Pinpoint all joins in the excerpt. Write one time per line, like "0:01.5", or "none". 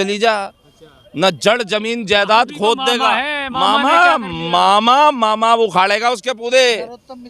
none